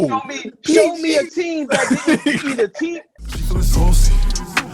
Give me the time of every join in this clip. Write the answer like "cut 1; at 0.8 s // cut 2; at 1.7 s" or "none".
cut 1; at 3.1 s